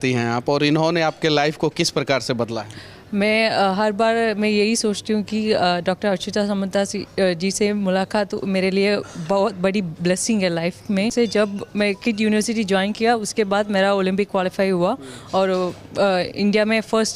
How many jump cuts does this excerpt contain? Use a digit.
1